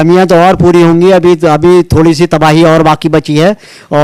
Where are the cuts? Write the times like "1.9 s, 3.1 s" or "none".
none